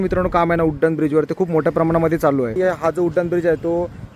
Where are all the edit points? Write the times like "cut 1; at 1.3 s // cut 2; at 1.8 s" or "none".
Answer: cut 1; at 2.5 s